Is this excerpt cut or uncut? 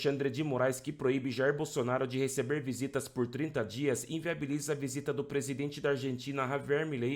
uncut